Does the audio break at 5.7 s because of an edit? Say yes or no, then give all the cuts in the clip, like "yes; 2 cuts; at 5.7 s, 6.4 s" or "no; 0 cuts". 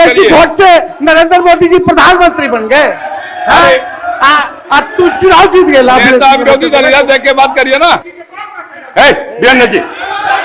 no; 1 cut; at 8.0 s